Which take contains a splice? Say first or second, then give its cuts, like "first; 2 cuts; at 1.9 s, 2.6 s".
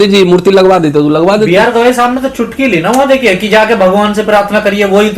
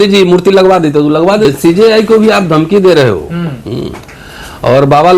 second; 1 cut; at 1.4 s